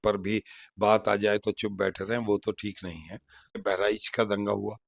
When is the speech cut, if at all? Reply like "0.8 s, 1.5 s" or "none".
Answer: 3.6 s

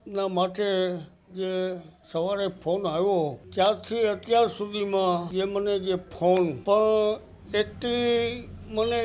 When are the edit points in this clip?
1.9 s, 3.4 s, 5.3 s, 6.6 s

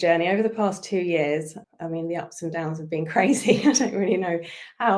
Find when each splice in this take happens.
1.6 s

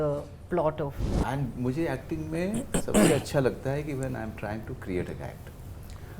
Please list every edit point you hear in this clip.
1.0 s

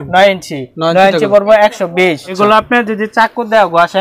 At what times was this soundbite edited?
2.3 s

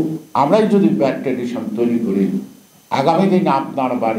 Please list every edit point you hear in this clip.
none

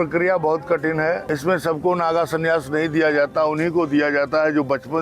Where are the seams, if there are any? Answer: 1.2 s

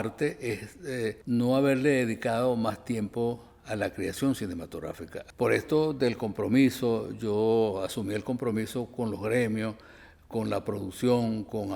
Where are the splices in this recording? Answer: none

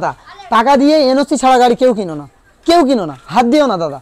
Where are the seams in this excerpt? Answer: none

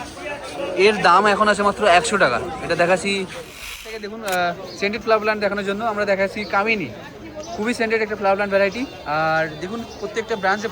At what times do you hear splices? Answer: 3.9 s

